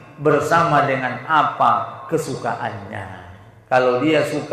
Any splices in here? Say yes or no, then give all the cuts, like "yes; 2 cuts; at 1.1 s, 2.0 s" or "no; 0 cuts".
no; 0 cuts